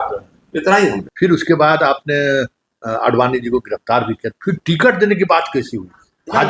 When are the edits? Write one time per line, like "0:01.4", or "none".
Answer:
0:01.1